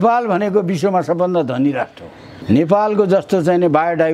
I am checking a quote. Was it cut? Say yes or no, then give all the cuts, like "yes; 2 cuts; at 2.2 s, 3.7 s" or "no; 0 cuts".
yes; 1 cut; at 2.4 s